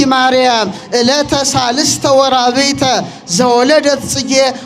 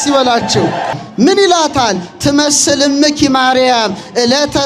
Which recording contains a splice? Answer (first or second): second